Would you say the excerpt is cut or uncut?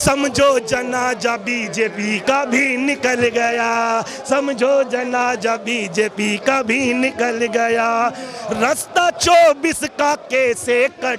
uncut